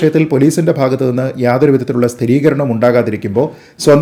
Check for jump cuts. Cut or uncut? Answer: uncut